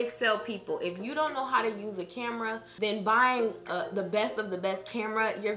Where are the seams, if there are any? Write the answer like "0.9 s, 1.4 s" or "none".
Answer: 2.7 s